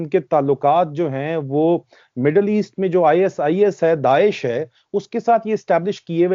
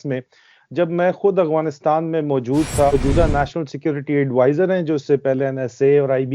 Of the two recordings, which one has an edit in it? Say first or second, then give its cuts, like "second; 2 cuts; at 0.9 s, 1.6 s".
second; 1 cut; at 2.9 s